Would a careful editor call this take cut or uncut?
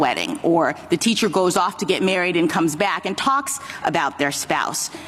uncut